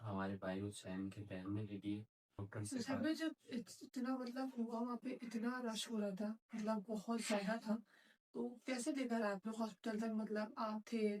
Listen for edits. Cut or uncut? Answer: cut